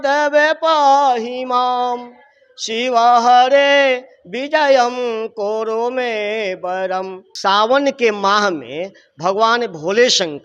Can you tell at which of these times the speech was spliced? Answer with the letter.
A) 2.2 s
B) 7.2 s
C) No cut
B